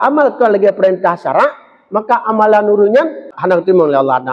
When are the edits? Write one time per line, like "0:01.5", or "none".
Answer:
0:03.4